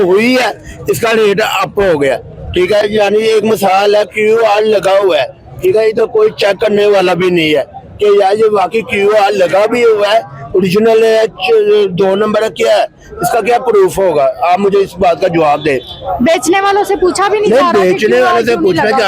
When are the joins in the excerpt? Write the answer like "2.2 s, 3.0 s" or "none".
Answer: none